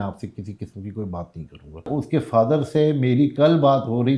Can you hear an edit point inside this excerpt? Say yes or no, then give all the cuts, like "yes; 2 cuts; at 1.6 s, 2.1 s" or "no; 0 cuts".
yes; 1 cut; at 1.9 s